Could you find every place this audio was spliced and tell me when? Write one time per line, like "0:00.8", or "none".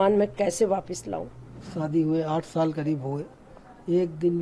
0:01.6

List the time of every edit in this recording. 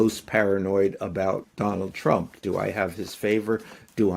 0:01.5

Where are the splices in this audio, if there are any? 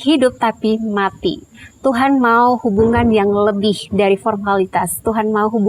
none

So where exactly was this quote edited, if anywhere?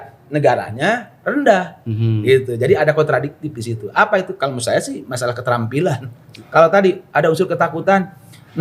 0:06.4

